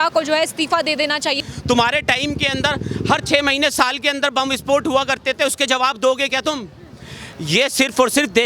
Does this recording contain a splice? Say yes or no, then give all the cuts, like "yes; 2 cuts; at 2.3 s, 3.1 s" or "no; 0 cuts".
yes; 1 cut; at 1.4 s